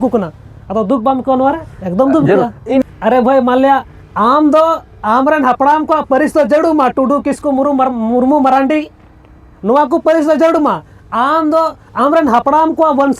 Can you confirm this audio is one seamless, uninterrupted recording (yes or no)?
no